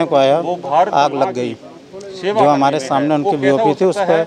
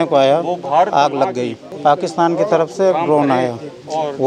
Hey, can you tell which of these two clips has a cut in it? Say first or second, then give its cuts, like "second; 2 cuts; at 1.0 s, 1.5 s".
second; 1 cut; at 1.6 s